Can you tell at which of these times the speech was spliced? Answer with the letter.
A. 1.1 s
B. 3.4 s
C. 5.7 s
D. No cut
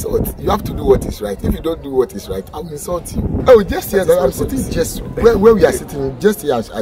B